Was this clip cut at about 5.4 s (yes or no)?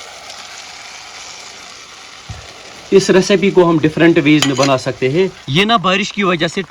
yes